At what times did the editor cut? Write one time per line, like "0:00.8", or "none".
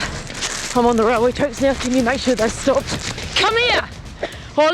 0:03.2